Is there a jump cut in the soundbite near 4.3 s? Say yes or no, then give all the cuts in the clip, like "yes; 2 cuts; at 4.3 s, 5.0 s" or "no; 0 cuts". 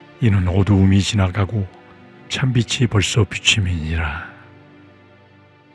yes; 1 cut; at 4.3 s